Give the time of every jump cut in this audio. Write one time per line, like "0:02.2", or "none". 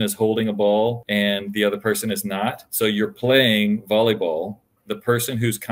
0:01.0
0:02.7
0:04.8